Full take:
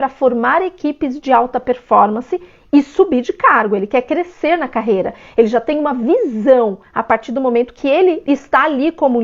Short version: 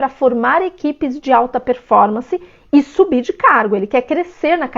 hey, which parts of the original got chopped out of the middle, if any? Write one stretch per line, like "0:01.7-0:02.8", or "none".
none